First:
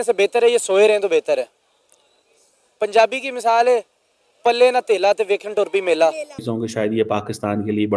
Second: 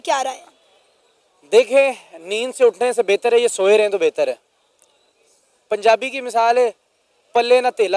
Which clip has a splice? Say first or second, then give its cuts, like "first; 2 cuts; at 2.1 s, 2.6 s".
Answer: first; 1 cut; at 6.4 s